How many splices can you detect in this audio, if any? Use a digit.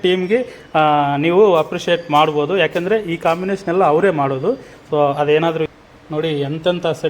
1